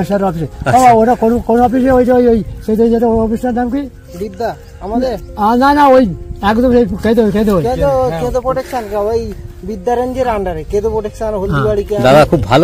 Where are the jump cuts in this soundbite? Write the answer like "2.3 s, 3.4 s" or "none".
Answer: none